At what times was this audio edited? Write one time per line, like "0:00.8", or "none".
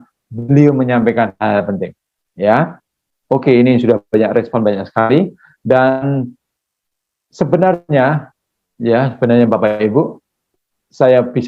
none